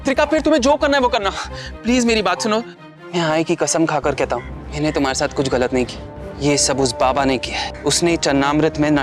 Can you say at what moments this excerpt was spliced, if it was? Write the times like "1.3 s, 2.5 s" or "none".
2.8 s, 6.0 s